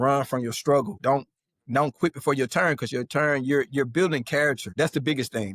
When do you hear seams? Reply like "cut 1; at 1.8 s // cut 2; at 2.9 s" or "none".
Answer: cut 1; at 0.9 s // cut 2; at 4.6 s